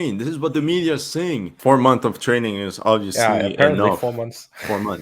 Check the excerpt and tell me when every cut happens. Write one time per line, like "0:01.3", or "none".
0:01.6

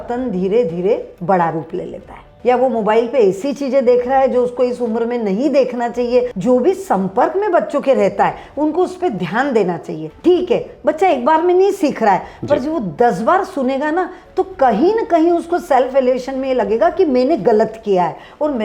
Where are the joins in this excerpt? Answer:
0:02.3
0:06.3
0:10.0

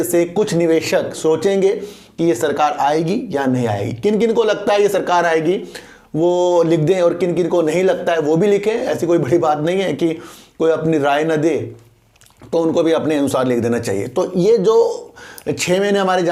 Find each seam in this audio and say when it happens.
none

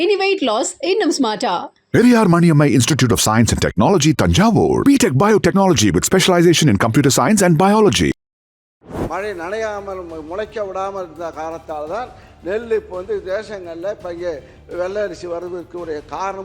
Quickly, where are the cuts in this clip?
0:08.9

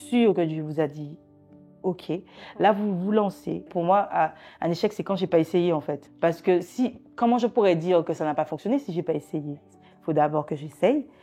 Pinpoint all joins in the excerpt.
0:03.7
0:06.0

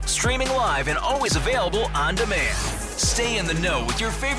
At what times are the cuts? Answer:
none

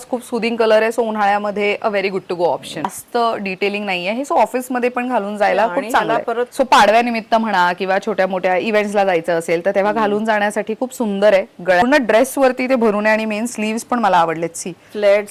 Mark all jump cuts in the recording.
0:03.0
0:06.5
0:11.8

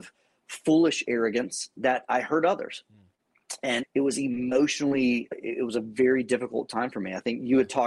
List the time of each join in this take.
0:01.7
0:03.8
0:05.3

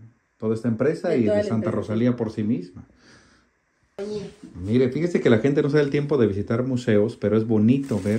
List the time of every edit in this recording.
0:03.9

